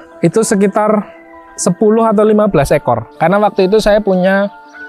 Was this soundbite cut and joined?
yes; 1 cut; at 3.1 s

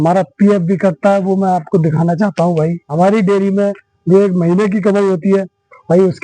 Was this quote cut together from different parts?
yes; 1 cut; at 2.8 s

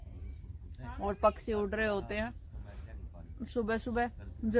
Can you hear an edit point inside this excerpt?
no; 0 cuts

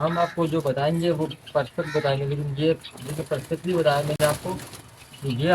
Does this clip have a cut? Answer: no; 0 cuts

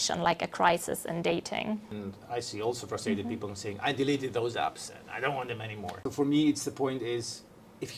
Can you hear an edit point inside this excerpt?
yes; 2 cuts; at 1.9 s, 6.0 s

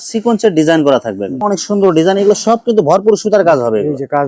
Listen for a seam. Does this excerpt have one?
yes; 1 cut; at 1.3 s

